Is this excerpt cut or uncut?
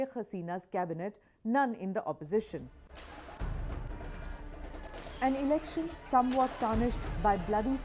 cut